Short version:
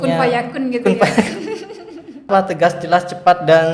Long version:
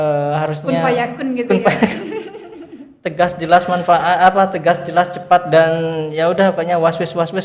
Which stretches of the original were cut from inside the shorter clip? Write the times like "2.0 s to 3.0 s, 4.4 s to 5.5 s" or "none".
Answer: 2.9 s to 4.3 s